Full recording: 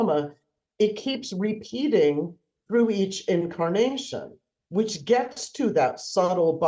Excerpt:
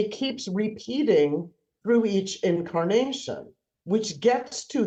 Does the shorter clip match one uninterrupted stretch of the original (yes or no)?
yes